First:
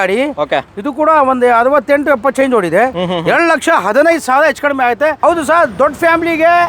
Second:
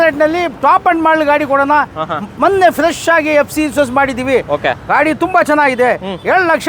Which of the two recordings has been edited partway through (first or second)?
first